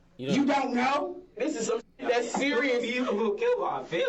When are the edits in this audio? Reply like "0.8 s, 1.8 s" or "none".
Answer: 1.4 s